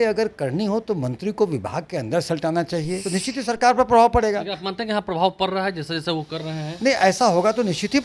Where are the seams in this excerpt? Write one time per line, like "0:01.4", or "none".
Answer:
0:03.0